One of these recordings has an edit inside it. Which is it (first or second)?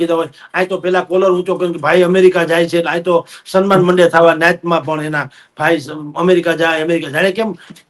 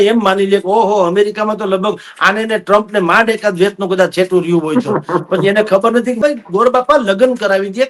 second